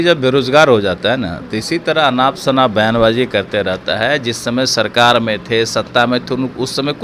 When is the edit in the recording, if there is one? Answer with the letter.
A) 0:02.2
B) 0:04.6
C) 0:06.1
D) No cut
D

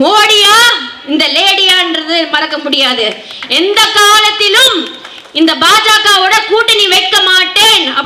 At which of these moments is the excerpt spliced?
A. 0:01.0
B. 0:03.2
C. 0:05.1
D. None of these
D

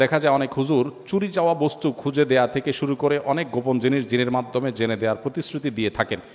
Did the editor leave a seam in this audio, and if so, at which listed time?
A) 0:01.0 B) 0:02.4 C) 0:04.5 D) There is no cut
D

